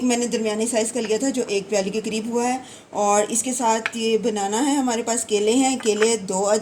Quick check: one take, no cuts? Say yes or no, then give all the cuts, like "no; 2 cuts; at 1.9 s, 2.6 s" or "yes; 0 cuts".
yes; 0 cuts